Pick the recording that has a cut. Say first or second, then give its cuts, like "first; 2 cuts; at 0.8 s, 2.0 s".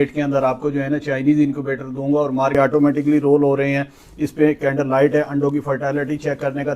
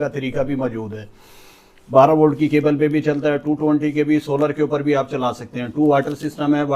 first; 1 cut; at 2.6 s